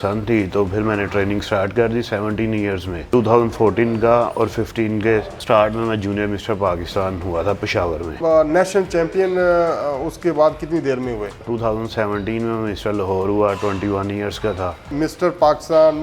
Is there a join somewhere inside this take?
yes; 5 cuts; at 3.1 s, 5.3 s, 8.1 s, 11.4 s, 14.9 s

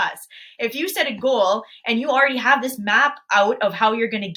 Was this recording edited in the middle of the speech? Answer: no; 0 cuts

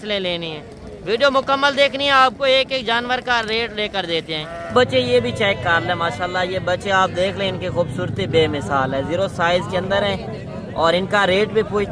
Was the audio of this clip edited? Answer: yes; 1 cut; at 4.6 s

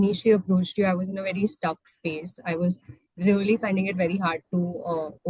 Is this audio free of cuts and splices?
yes; 0 cuts

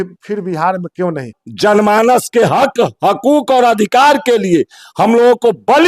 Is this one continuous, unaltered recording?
no; 1 cut; at 1.4 s

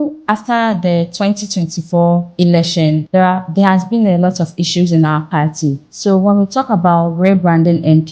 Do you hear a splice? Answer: yes; 2 cuts; at 2.8 s, 5.9 s

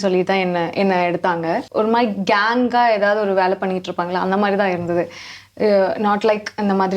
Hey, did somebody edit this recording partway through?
yes; 1 cut; at 1.7 s

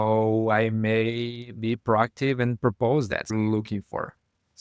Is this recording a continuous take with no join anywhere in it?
no; 1 cut; at 3.3 s

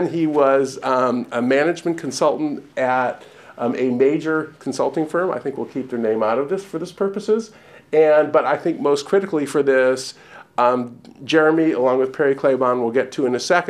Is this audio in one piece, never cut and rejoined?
yes; 0 cuts

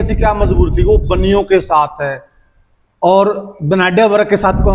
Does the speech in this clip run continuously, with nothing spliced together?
yes; 0 cuts

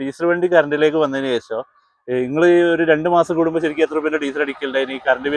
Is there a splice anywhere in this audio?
no; 0 cuts

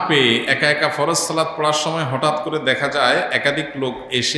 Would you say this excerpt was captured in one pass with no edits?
yes; 0 cuts

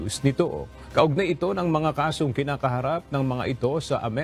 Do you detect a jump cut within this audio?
yes; 1 cut; at 1.5 s

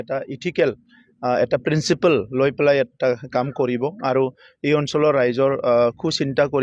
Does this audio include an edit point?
no; 0 cuts

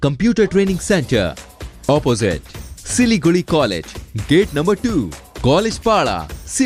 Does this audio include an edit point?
no; 0 cuts

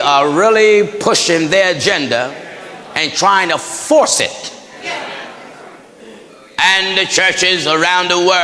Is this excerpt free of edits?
yes; 0 cuts

